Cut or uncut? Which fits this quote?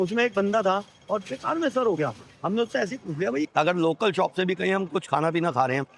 cut